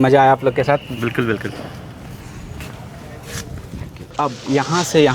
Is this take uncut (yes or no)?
no